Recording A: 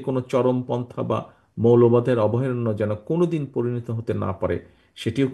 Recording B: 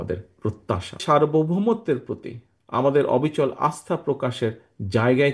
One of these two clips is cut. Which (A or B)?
B